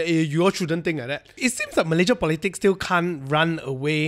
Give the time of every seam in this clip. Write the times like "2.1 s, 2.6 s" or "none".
1.3 s

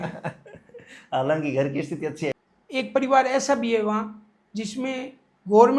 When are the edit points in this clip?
2.3 s

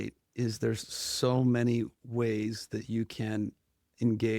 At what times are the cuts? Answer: none

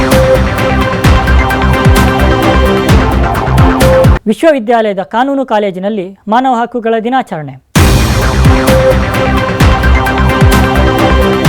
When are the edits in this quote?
none

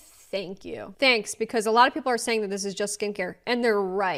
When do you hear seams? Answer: none

